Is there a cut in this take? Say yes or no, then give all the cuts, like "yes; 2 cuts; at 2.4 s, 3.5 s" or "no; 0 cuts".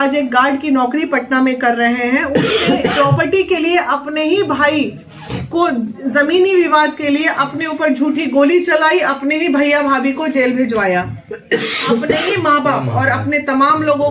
no; 0 cuts